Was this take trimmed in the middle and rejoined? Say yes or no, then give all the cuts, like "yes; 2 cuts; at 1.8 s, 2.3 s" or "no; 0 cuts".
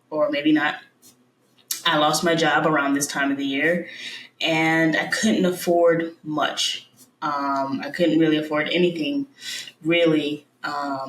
no; 0 cuts